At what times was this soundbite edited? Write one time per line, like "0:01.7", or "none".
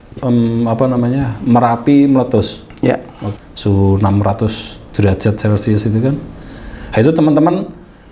0:03.3